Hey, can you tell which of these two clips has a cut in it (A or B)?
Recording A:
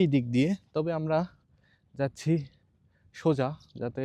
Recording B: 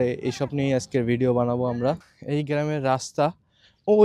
B